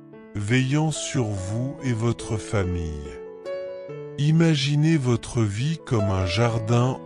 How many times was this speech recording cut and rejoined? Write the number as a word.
two